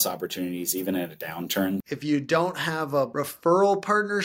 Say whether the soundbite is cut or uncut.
cut